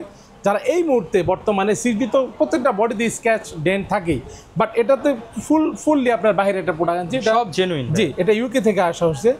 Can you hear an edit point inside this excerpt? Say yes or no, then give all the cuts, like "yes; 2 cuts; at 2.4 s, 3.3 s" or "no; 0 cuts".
no; 0 cuts